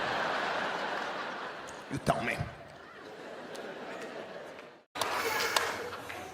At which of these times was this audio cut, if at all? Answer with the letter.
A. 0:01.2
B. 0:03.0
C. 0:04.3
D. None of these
C